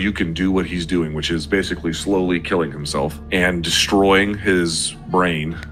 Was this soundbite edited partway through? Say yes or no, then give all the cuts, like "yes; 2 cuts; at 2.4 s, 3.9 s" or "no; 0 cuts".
no; 0 cuts